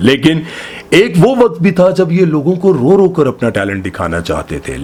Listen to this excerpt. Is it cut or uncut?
uncut